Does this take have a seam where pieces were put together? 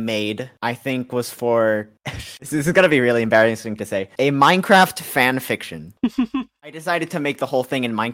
yes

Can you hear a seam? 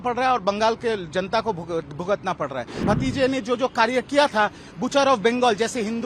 yes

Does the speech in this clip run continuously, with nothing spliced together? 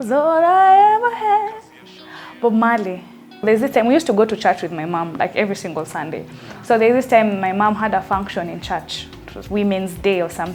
no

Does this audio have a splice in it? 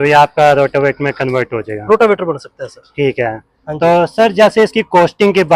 no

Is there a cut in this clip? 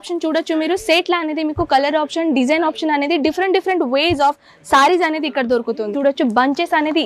yes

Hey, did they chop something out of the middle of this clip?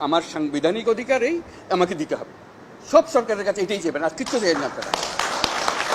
no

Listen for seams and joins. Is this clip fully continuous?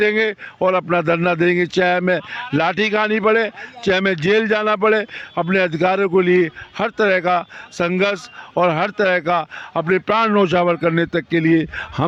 yes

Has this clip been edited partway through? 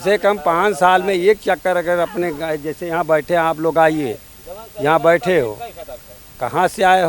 no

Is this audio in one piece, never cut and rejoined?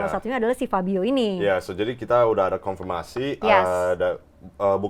yes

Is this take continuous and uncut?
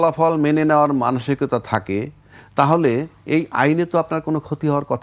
yes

